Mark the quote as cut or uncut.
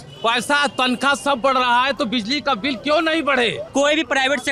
cut